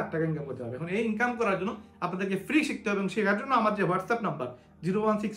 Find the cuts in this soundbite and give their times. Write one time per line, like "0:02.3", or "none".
none